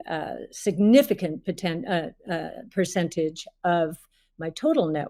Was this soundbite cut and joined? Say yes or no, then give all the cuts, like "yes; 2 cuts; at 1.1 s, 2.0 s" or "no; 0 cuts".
no; 0 cuts